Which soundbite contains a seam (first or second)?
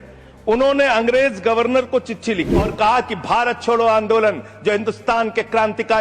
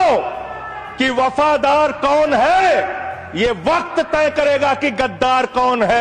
first